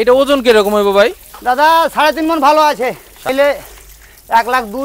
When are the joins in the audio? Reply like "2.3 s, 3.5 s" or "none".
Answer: 3.3 s